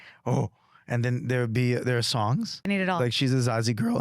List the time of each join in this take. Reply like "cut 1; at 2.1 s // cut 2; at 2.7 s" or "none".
cut 1; at 2.7 s